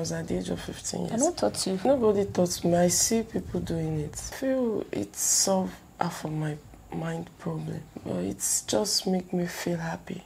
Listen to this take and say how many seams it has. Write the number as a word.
three